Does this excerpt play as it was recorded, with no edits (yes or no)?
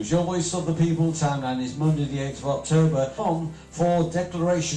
yes